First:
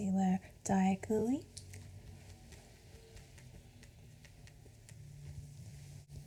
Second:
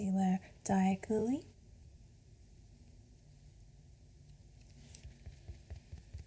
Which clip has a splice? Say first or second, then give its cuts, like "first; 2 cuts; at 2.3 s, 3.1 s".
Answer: second; 2 cuts; at 1.5 s, 5.0 s